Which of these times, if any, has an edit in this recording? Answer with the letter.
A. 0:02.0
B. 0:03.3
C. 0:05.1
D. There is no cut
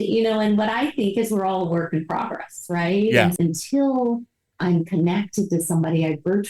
B